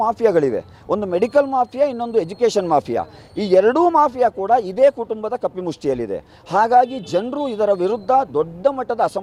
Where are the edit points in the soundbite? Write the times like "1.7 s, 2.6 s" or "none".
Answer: none

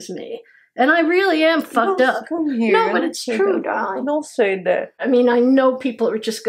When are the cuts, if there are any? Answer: 4.9 s

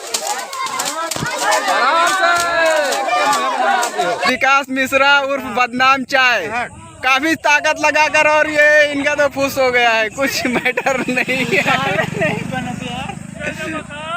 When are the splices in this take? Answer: 4.3 s

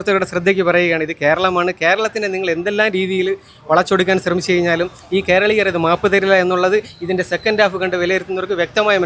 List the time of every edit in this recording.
none

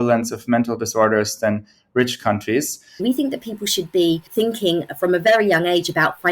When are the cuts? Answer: 3.0 s, 4.3 s

